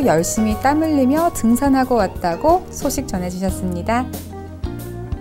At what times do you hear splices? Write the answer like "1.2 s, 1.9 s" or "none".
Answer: 4.1 s